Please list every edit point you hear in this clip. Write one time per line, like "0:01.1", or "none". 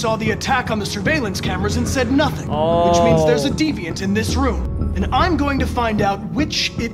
0:02.4
0:04.7